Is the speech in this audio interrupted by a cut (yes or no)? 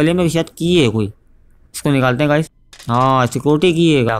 yes